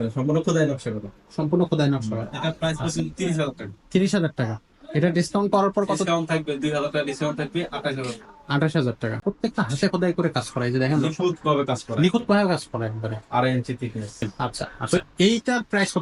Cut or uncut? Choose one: cut